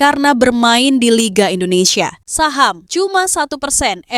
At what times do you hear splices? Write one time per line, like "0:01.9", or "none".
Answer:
0:02.2
0:02.8